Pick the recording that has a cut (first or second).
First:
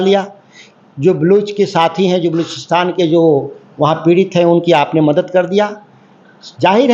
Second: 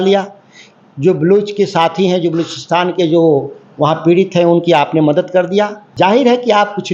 second